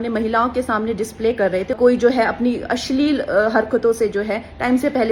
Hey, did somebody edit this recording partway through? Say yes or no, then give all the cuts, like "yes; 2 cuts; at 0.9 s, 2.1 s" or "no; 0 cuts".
yes; 1 cut; at 1.8 s